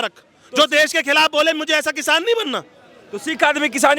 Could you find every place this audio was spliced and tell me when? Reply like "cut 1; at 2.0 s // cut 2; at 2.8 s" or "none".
none